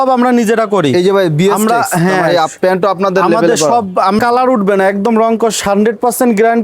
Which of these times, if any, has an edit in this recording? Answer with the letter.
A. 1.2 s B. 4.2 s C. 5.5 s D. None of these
B